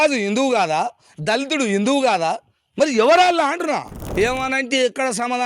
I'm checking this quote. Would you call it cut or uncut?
cut